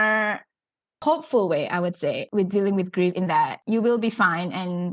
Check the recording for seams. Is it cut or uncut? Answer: cut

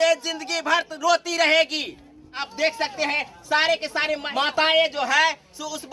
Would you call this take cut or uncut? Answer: cut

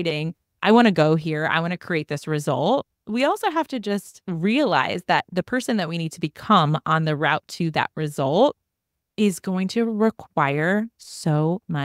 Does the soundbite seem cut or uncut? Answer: cut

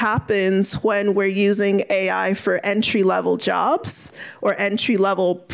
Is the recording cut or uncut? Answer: uncut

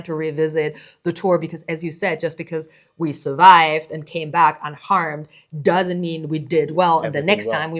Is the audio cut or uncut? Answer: uncut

